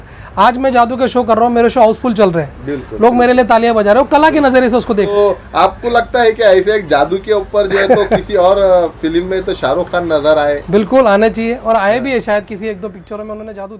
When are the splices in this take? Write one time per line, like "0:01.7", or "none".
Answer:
0:05.1